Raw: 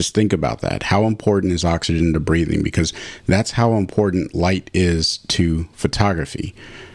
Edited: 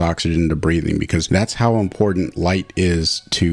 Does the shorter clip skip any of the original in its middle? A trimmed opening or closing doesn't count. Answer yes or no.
yes